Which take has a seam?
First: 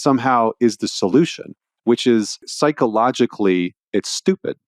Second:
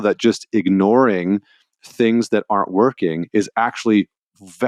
first; 1 cut; at 2.5 s

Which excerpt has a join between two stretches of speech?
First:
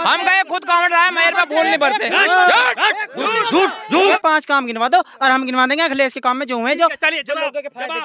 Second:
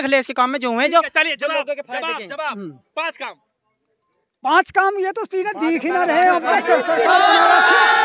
first; 1 cut; at 4.1 s

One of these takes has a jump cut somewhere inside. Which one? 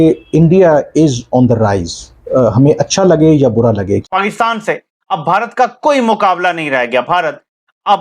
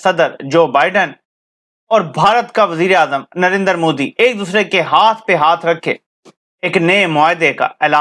first; 1 cut; at 4.0 s

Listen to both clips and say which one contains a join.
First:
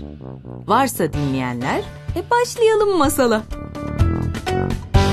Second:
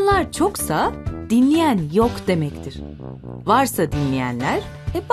first; 1 cut; at 3.6 s

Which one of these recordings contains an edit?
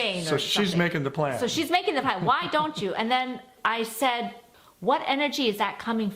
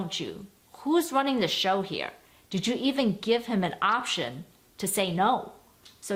first; 2 cuts; at 3.5 s, 4.5 s

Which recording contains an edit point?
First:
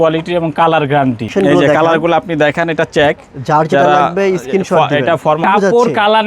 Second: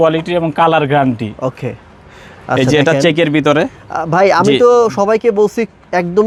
first; 2 cuts; at 1.3 s, 5.4 s

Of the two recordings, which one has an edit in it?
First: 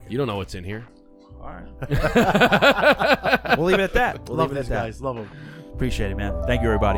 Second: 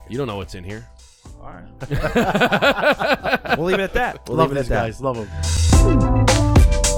second; 1 cut; at 5.5 s

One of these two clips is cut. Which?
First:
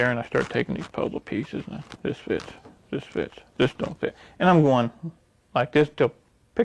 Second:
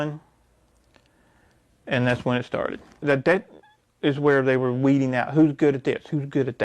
second; 1 cut; at 3.0 s

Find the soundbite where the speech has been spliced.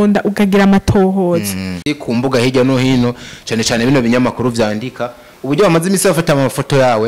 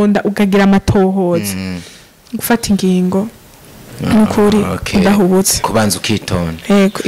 first; 1 cut; at 1.9 s

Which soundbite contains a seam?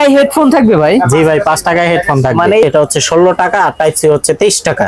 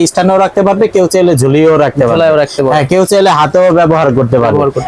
first; 1 cut; at 2.6 s

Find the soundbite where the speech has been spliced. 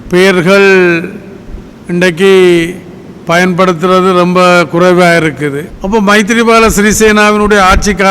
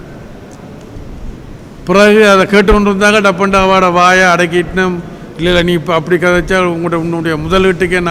first; 1 cut; at 5.7 s

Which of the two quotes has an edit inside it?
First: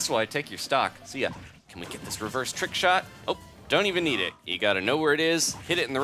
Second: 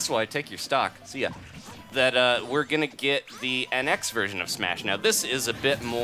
first; 2 cuts; at 1.8 s, 4.4 s

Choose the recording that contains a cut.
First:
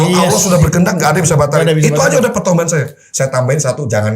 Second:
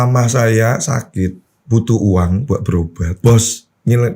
second; 2 cuts; at 1.5 s, 3.1 s

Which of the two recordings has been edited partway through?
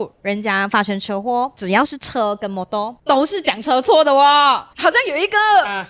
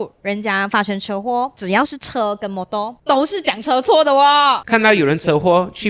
second; 1 cut; at 4.6 s

